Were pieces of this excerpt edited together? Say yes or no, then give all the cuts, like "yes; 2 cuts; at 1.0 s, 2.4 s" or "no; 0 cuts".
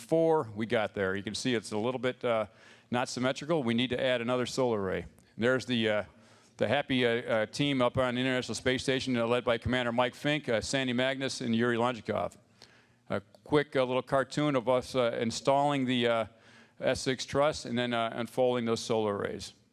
yes; 1 cut; at 18.7 s